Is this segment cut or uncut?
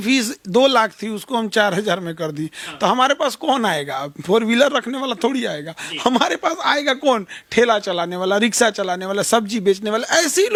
uncut